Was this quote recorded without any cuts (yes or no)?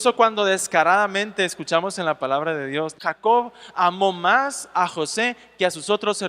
no